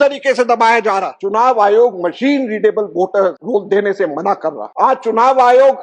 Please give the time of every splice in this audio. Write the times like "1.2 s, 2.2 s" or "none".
1.1 s, 3.4 s, 4.6 s